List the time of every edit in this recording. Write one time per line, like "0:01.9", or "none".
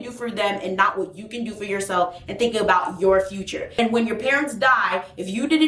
0:03.7